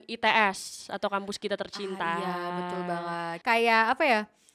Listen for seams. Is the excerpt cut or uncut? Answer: cut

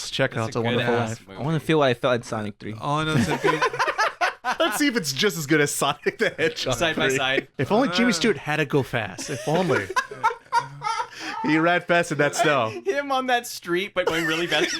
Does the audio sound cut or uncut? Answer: cut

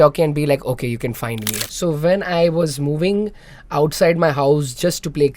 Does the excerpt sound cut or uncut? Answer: cut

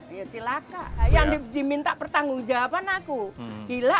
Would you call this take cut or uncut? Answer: cut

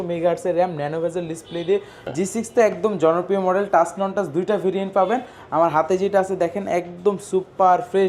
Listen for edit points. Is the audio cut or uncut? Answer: cut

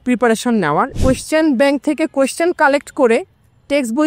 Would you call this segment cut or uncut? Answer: cut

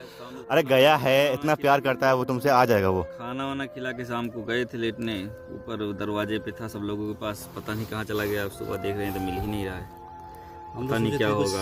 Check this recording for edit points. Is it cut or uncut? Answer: uncut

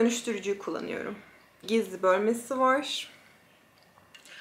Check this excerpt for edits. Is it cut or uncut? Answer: cut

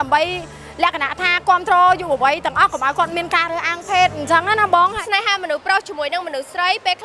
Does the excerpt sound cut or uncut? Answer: cut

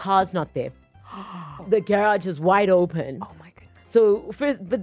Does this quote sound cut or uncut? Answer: cut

